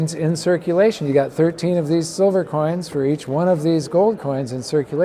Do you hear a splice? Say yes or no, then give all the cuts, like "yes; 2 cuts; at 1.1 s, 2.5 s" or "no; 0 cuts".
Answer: no; 0 cuts